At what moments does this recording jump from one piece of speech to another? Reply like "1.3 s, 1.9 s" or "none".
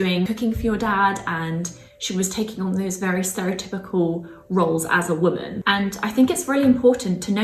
5.5 s